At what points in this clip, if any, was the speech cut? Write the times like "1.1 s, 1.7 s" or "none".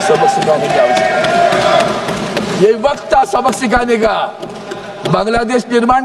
none